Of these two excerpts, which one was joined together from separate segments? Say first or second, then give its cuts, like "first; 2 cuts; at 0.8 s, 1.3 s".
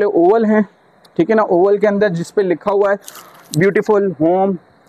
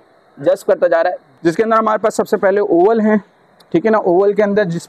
second; 1 cut; at 1.2 s